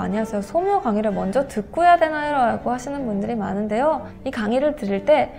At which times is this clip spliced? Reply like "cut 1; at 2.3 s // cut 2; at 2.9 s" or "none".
cut 1; at 4.2 s